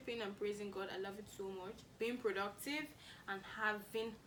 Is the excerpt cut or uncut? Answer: uncut